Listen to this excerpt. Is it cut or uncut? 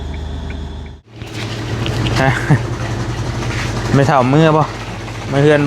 cut